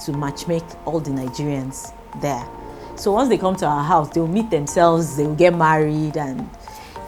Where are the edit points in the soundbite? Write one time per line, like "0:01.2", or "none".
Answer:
none